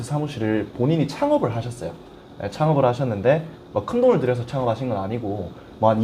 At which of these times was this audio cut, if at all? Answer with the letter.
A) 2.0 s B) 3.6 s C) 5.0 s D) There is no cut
D